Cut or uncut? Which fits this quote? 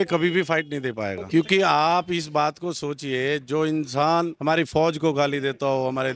uncut